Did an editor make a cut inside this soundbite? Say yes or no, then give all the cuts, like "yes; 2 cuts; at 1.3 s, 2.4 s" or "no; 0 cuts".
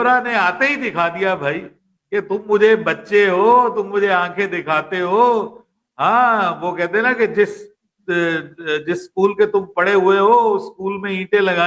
no; 0 cuts